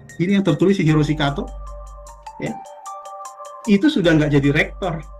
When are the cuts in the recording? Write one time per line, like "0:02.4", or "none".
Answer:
none